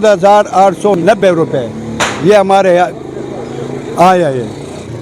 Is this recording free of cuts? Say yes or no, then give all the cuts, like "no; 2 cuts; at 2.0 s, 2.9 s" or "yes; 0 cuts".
yes; 0 cuts